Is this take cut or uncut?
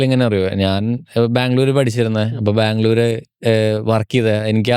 uncut